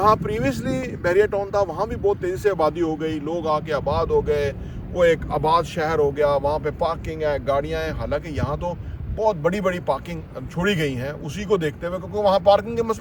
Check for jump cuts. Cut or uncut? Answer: uncut